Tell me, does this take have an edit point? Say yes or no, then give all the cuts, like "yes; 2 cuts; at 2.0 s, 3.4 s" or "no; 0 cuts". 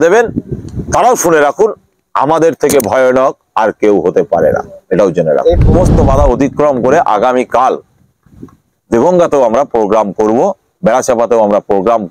yes; 1 cut; at 5.7 s